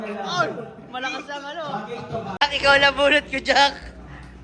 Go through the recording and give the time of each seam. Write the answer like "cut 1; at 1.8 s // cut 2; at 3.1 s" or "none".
cut 1; at 2.4 s